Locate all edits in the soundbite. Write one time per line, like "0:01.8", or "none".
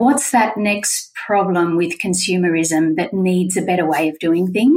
none